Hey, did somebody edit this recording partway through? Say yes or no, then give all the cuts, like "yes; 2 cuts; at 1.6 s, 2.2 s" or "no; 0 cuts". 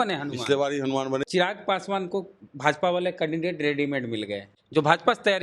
yes; 2 cuts; at 1.2 s, 4.5 s